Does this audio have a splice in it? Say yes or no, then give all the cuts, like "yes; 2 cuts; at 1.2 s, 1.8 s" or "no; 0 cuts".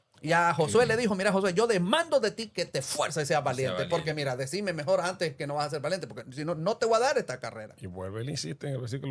no; 0 cuts